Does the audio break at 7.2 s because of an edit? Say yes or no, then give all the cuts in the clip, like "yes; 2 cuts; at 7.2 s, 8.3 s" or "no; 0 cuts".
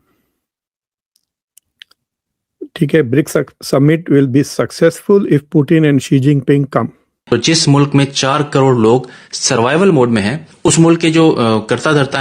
yes; 1 cut; at 7.2 s